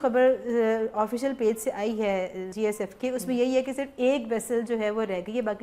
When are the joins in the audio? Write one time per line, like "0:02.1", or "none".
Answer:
0:02.4

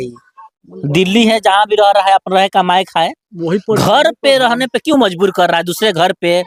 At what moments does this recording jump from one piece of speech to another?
none

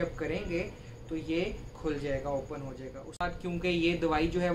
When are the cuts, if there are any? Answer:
0:03.2

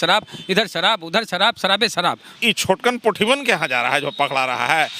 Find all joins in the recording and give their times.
0:02.3

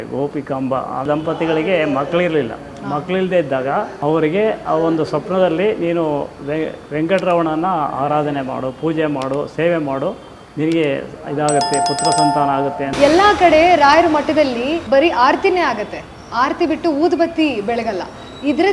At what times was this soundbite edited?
0:01.1
0:03.9
0:12.9

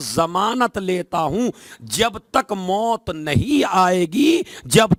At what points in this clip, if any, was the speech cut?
none

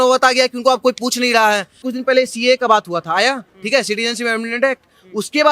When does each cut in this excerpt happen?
0:01.8

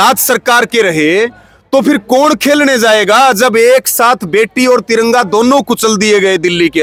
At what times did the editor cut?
none

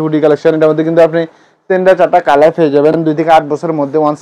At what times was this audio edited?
none

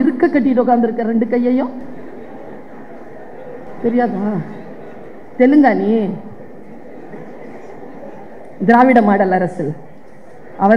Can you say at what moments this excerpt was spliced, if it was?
none

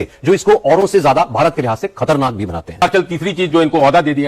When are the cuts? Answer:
0:02.8

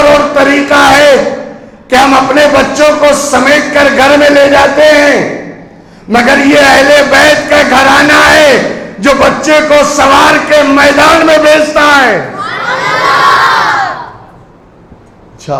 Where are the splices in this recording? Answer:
none

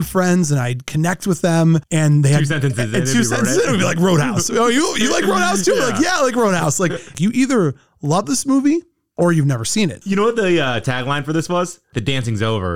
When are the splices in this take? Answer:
0:07.1
0:10.0

